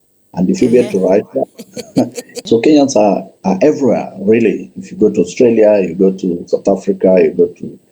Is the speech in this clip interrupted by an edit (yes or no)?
yes